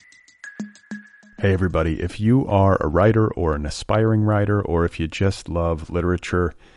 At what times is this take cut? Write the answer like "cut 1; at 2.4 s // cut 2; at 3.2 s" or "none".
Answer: cut 1; at 1.0 s